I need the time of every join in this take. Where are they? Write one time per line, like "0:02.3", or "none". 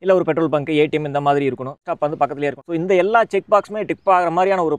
0:02.2